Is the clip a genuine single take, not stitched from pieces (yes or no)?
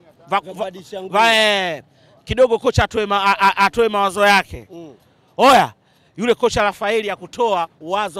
yes